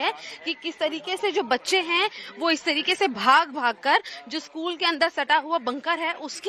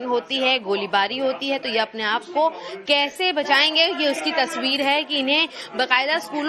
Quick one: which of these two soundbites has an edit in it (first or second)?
second